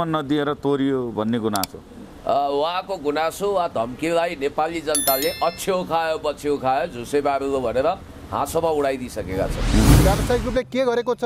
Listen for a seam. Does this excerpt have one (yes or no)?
yes